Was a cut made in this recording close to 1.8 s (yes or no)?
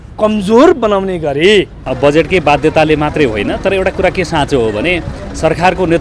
yes